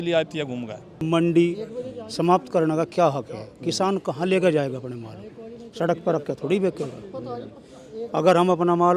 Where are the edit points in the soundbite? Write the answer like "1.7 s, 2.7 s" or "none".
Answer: 1.0 s